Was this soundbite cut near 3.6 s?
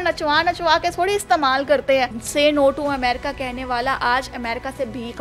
no; 1 cut; at 2.2 s

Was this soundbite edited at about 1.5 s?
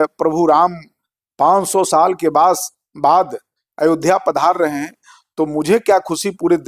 no; 0 cuts

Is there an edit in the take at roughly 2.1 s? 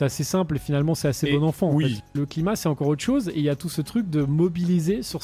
yes; 1 cut; at 2.1 s

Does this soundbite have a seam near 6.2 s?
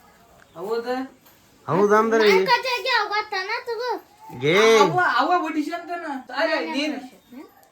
yes; 1 cut; at 6.2 s

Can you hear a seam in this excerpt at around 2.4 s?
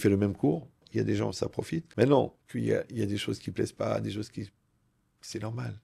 yes; 3 cuts; at 0.9 s, 1.9 s, 2.4 s

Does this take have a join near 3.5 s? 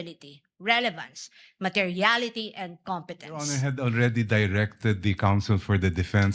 yes; 1 cut; at 3.5 s

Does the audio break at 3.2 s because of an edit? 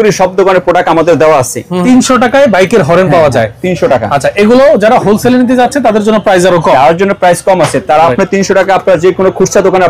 no; 1 cut; at 1.7 s

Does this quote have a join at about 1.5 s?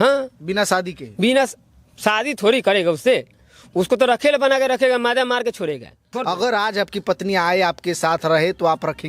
no; 1 cut; at 6.1 s

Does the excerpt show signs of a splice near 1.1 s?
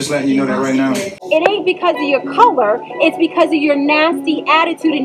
yes; 1 cut; at 1.1 s

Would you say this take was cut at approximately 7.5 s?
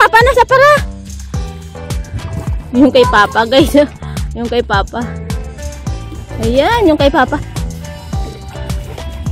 yes; 3 cuts; at 5.1 s, 6.4 s, 7.5 s

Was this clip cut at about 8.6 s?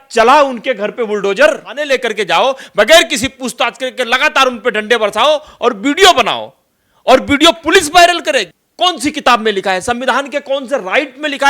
yes; 2 cuts; at 1.7 s, 8.6 s

